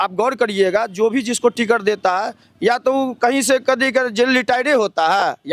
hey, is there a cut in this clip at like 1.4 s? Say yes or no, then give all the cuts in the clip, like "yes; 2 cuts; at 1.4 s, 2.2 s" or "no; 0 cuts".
no; 0 cuts